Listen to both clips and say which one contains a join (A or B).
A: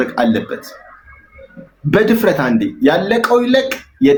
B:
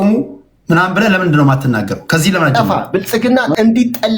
B